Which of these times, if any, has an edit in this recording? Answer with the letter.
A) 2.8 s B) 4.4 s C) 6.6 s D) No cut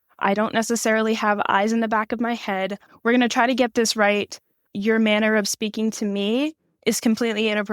A